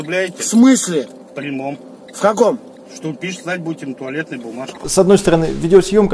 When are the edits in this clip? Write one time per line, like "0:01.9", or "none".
0:02.8
0:04.7